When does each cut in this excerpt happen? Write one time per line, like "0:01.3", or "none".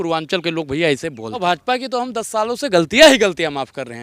0:01.4